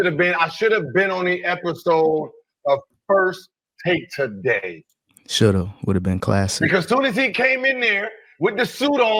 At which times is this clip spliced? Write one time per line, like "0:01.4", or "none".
none